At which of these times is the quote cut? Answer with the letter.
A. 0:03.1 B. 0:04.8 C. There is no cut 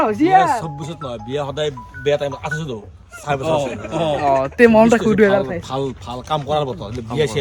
C